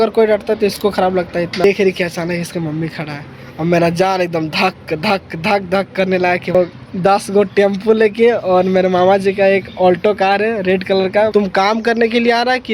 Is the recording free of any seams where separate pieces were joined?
no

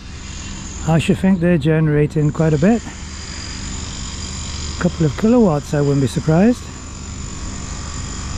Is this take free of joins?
yes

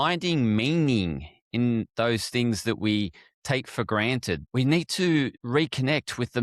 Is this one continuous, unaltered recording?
no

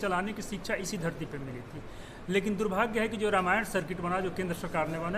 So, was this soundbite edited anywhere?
no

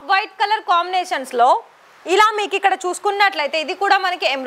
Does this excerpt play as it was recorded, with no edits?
yes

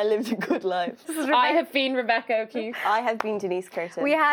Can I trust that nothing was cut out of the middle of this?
no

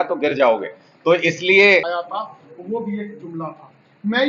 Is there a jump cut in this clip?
yes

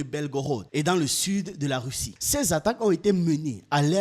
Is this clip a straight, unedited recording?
no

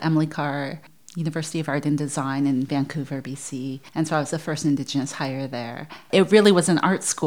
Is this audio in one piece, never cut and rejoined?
no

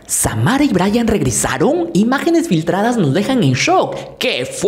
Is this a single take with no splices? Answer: yes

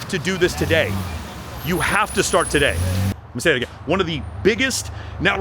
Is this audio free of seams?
no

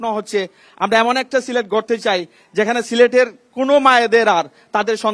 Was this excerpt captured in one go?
yes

